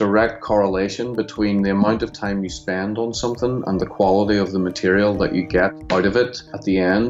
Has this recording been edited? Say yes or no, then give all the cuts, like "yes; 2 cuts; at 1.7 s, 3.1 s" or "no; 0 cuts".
yes; 1 cut; at 6.2 s